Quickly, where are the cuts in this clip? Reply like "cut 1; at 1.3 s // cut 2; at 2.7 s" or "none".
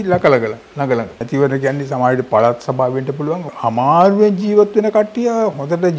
cut 1; at 1.2 s